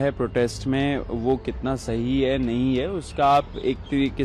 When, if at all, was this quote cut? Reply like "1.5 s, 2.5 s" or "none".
none